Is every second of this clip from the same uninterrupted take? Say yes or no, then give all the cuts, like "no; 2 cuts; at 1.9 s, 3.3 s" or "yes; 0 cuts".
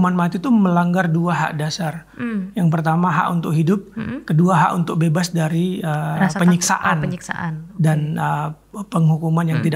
yes; 0 cuts